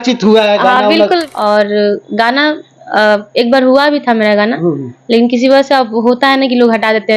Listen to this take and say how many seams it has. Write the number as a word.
one